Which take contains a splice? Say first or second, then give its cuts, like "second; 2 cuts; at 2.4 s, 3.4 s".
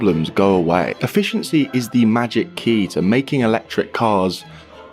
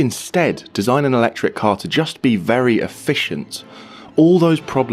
first; 1 cut; at 1.0 s